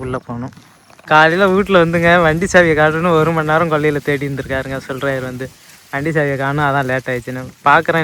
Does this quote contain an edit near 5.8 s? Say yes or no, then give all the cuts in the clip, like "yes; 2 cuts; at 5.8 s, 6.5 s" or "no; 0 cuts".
no; 1 cut; at 1.0 s